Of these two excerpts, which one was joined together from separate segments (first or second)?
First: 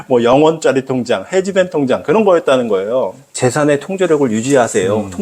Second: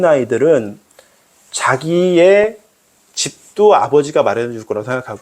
first